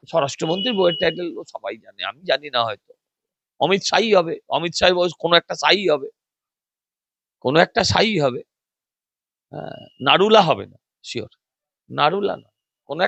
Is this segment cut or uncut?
uncut